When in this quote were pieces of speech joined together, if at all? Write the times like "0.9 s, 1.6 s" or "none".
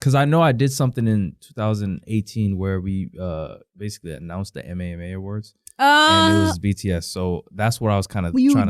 none